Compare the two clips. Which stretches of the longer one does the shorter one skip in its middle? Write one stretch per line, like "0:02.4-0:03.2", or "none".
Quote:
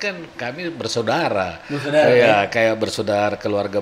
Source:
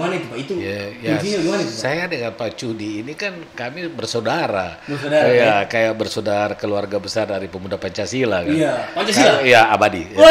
none